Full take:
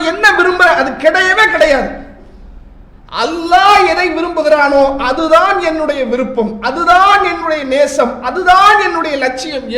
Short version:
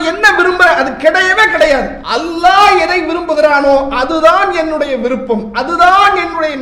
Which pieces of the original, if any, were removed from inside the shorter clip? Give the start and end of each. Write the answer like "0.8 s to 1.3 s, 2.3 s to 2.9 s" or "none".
2.0 s to 3.1 s